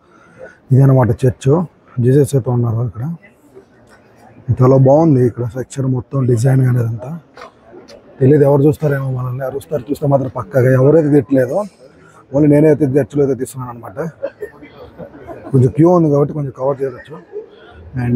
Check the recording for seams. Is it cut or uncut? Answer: uncut